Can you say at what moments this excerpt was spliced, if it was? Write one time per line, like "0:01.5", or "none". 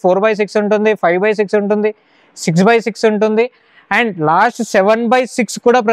none

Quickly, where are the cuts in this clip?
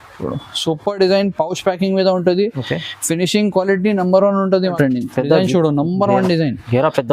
0:04.6

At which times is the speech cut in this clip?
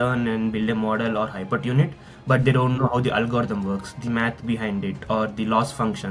none

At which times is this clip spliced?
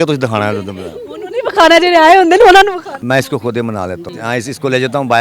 0:02.9
0:04.1

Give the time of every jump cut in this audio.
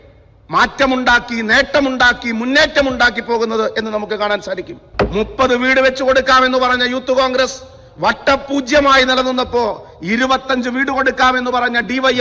0:04.9

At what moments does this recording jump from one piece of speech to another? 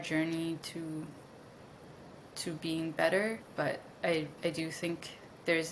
0:03.4

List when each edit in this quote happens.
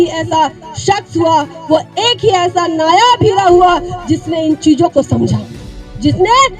none

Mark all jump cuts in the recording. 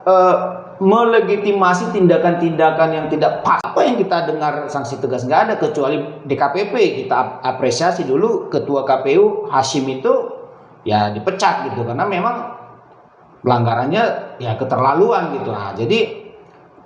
0:03.7

